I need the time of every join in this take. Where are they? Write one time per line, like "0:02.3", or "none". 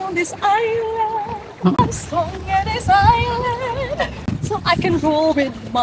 0:01.8
0:04.3